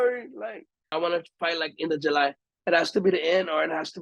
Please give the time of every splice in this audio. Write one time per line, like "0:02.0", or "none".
0:00.9
0:02.5